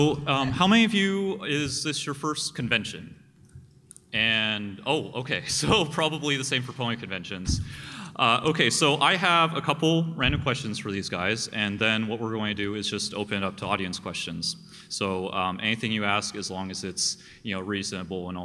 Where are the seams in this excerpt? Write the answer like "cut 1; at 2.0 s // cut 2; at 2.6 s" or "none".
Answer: cut 1; at 6.7 s